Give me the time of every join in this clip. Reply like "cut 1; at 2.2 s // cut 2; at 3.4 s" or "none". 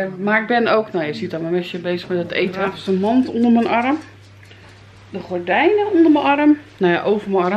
cut 1; at 2.7 s